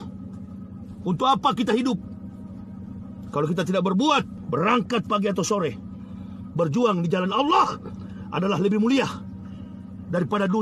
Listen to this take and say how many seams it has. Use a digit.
1